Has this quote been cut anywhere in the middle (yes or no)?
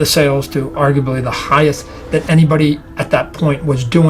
no